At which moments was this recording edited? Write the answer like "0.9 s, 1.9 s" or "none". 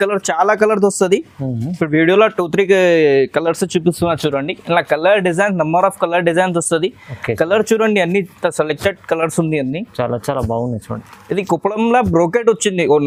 none